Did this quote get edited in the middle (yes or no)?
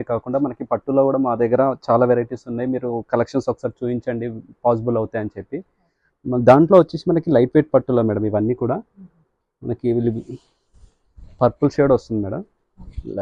no